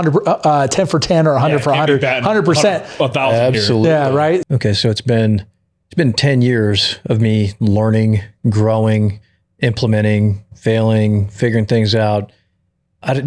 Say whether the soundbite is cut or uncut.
cut